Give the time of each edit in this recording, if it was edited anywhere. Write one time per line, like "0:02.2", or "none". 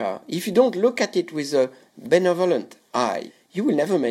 0:01.8
0:03.3